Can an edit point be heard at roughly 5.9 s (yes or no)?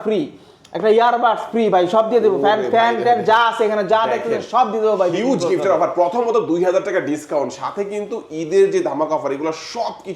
no